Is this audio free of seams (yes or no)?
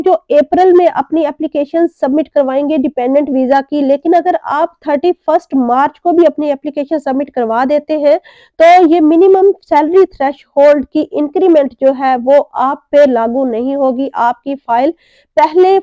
yes